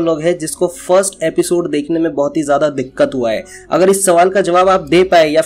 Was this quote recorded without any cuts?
yes; 0 cuts

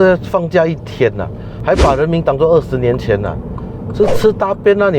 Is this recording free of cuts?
no; 1 cut; at 1.6 s

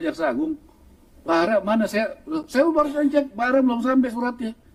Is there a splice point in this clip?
no; 0 cuts

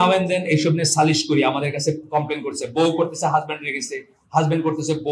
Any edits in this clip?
no; 0 cuts

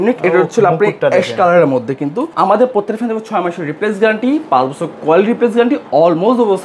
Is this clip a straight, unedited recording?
no; 1 cut; at 2.3 s

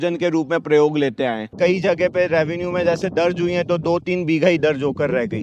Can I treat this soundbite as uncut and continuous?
no; 1 cut; at 1.5 s

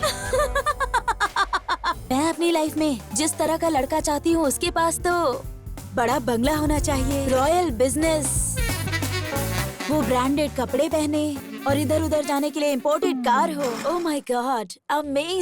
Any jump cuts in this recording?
yes; 4 cuts; at 2.1 s, 7.2 s, 11.5 s, 13.8 s

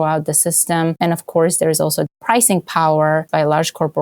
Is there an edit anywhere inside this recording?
yes; 3 cuts; at 1.0 s, 2.1 s, 3.3 s

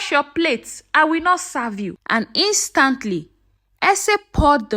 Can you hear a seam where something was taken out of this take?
yes; 1 cut; at 1.9 s

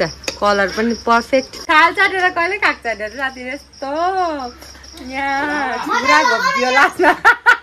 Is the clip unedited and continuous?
no; 1 cut; at 1.6 s

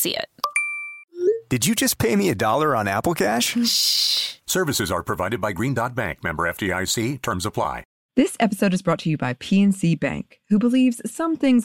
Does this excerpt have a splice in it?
yes; 1 cut; at 7.9 s

